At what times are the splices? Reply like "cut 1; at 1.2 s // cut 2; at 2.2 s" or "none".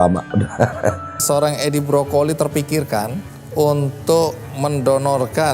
cut 1; at 1.1 s